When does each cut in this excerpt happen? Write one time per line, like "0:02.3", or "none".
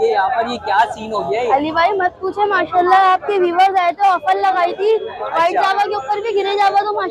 none